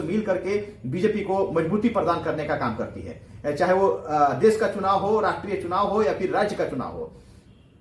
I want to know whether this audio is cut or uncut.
uncut